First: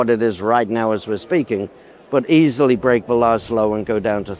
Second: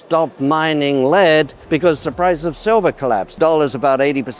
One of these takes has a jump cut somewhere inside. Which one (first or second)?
second